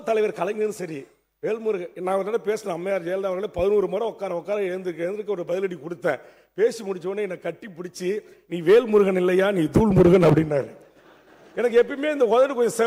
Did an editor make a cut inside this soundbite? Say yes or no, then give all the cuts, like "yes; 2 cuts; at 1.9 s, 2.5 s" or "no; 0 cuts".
no; 0 cuts